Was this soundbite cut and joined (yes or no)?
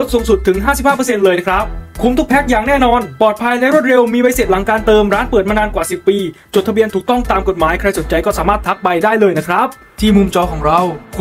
yes